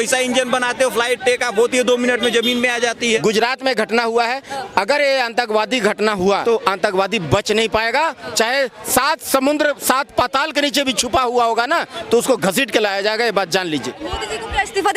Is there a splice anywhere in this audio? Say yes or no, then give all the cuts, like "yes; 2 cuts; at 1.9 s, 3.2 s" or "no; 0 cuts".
yes; 3 cuts; at 3.2 s, 6.4 s, 14.0 s